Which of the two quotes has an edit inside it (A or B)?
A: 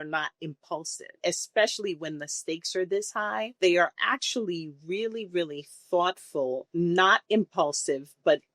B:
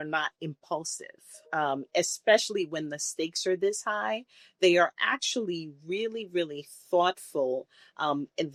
A